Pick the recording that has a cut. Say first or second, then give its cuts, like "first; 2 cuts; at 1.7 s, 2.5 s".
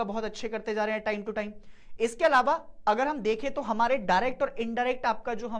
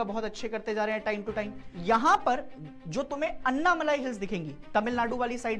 second; 1 cut; at 1.6 s